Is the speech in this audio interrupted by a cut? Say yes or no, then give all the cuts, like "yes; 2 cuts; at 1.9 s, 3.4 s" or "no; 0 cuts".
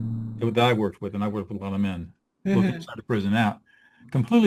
no; 0 cuts